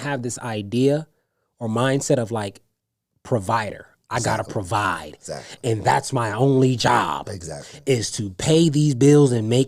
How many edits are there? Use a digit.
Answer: 0